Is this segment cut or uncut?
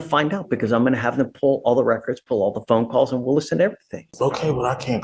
cut